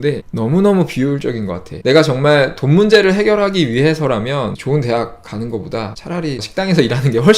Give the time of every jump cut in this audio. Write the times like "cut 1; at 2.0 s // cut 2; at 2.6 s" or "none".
cut 1; at 1.7 s // cut 2; at 4.6 s // cut 3; at 6.3 s

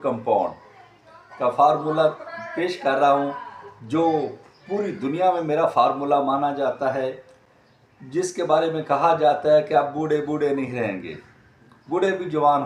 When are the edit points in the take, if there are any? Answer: none

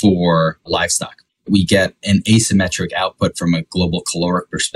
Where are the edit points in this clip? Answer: cut 1; at 0.8 s // cut 2; at 2.0 s

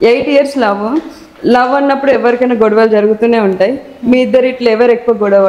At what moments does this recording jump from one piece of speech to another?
none

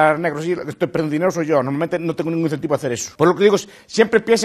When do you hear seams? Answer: cut 1; at 3.1 s

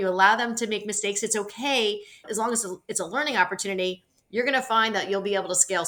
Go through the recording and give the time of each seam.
none

